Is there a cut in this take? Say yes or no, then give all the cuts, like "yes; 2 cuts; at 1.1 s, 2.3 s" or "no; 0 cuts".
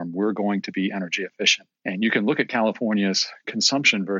yes; 1 cut; at 1.7 s